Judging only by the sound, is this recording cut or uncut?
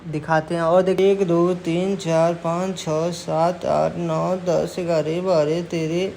cut